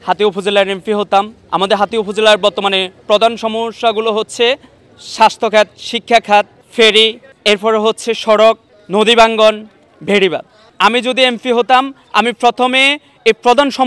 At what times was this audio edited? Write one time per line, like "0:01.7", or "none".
none